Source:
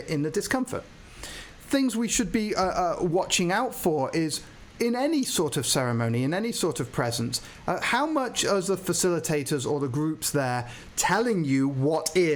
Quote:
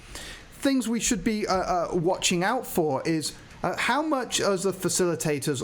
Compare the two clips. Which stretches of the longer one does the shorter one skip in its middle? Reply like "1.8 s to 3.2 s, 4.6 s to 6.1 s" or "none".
4.5 s to 7.5 s